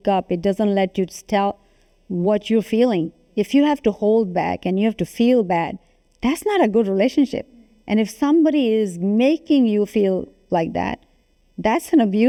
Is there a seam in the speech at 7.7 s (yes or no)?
no